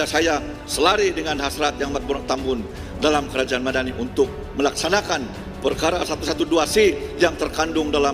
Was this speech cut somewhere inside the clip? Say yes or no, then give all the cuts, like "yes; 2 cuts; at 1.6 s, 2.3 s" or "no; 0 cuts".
no; 0 cuts